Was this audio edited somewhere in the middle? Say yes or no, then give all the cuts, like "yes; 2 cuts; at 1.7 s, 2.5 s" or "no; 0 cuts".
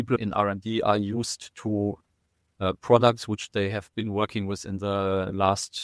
no; 0 cuts